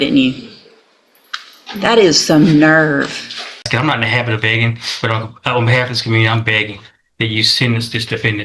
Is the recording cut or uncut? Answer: cut